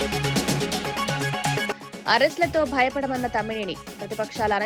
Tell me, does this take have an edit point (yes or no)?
yes